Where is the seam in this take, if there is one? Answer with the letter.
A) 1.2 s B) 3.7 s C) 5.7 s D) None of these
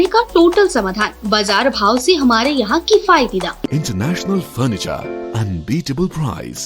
B